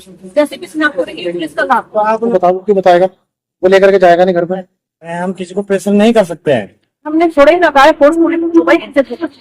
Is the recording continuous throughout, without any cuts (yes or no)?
no